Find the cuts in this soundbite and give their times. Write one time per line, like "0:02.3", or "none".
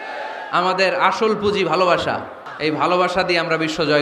0:02.4